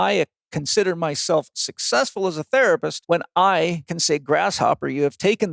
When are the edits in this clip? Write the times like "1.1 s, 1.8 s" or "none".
2.9 s, 3.9 s